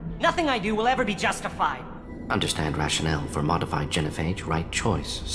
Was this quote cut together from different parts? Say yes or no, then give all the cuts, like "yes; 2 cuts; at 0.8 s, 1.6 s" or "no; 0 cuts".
yes; 1 cut; at 2.1 s